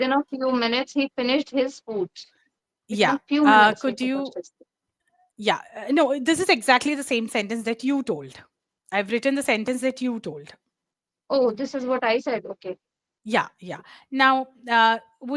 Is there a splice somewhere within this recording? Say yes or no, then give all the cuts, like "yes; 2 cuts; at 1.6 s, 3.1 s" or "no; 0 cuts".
no; 0 cuts